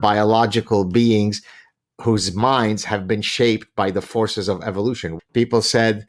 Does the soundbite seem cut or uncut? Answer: cut